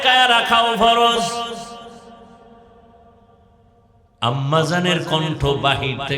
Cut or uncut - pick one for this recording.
uncut